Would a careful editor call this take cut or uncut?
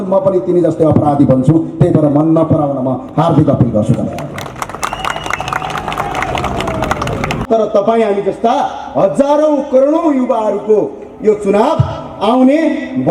cut